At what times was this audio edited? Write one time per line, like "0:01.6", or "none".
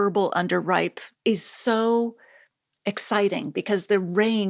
0:01.0